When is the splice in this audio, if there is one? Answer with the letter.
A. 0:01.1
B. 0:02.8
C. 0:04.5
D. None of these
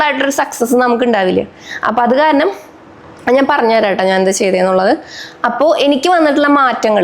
D